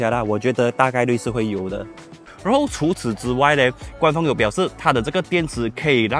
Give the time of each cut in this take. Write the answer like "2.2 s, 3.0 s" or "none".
2.2 s